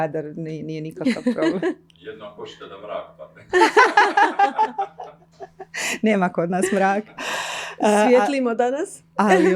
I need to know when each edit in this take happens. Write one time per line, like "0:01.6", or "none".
none